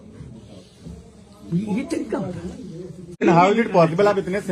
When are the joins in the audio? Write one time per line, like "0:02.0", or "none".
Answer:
0:03.2